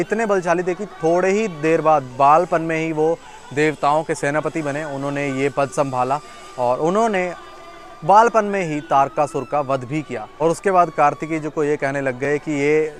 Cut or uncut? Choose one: uncut